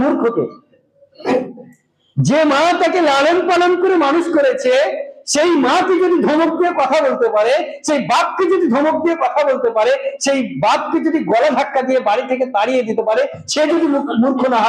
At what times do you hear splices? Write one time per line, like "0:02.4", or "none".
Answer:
none